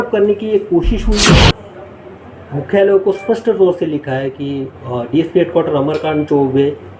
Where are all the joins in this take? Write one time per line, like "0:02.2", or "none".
0:01.5